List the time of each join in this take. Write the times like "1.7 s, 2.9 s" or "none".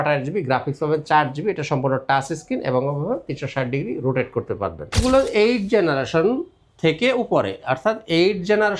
5.0 s

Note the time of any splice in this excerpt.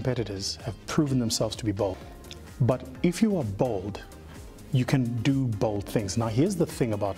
2.0 s

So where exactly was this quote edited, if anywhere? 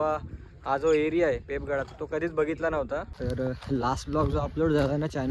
3.1 s

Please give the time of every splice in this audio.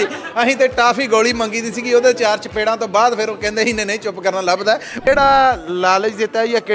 5.1 s

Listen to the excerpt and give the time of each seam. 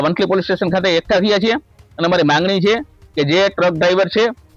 none

